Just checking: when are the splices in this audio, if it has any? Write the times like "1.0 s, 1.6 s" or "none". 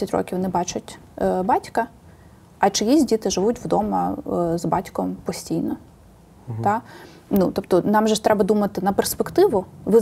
none